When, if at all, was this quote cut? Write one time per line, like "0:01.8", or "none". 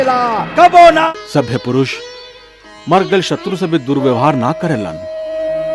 0:01.1